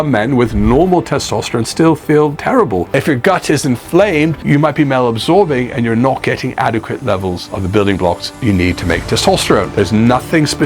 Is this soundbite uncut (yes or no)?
no